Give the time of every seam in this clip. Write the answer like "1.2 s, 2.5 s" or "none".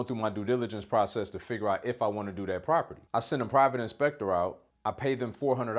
3.0 s, 4.7 s